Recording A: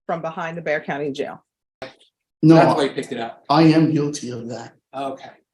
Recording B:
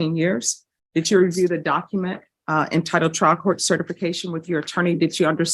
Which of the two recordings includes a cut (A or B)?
A